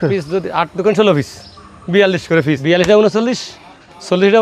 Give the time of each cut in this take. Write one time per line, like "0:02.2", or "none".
0:02.6